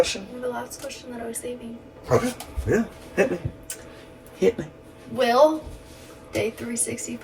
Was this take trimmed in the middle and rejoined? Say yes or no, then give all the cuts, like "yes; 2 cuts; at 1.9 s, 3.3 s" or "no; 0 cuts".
no; 0 cuts